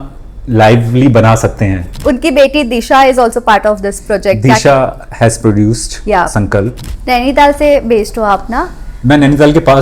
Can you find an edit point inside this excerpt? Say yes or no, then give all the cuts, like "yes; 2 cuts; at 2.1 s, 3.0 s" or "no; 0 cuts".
yes; 2 cuts; at 1.9 s, 6.9 s